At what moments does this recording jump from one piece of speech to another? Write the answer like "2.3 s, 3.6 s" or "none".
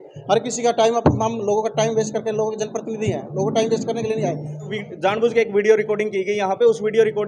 4.7 s